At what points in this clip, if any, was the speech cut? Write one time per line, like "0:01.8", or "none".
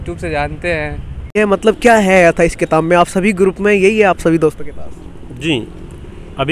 0:01.3